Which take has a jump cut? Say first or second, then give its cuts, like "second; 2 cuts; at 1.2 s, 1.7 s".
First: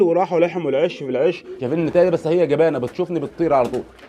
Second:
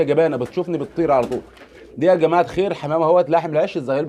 first; 1 cut; at 1.5 s